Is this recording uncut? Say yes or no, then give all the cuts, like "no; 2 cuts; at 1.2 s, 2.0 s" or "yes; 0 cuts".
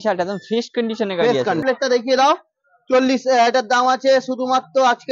no; 1 cut; at 1.6 s